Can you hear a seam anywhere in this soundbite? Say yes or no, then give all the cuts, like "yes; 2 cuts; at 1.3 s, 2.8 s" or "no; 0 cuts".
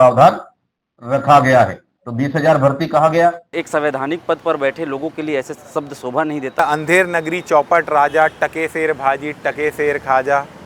yes; 2 cuts; at 3.6 s, 6.6 s